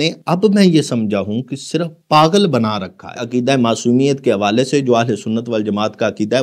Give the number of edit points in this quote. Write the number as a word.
one